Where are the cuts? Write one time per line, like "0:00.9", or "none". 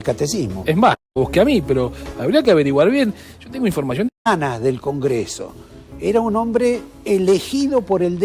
0:01.2
0:04.3